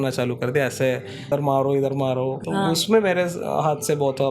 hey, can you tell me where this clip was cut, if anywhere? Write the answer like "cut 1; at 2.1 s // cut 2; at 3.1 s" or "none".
cut 1; at 1.3 s // cut 2; at 2.4 s